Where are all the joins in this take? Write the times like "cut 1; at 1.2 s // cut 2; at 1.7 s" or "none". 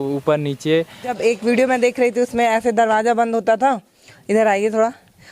cut 1; at 1.2 s